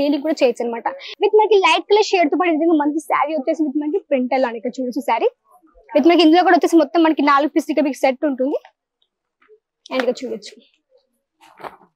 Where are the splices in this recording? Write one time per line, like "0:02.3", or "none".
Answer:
0:01.0